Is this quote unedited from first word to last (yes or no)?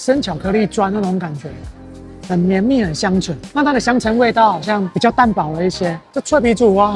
no